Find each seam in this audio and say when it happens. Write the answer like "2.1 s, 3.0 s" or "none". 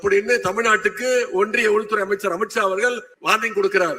3.1 s